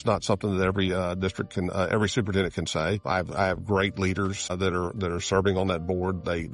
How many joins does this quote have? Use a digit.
2